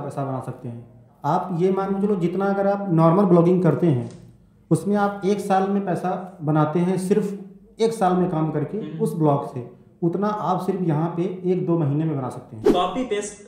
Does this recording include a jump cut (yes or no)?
yes